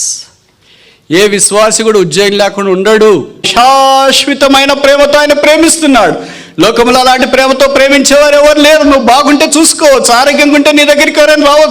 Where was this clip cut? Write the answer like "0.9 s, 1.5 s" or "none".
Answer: 3.5 s